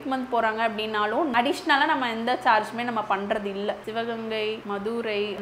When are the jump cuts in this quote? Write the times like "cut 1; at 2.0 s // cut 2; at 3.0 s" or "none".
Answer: cut 1; at 3.8 s